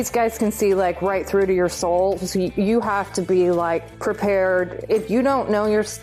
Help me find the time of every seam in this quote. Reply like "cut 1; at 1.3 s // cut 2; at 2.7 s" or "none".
cut 1; at 3.9 s // cut 2; at 4.8 s